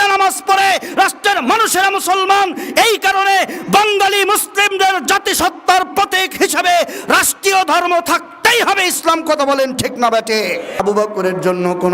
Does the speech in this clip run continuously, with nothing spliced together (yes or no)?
no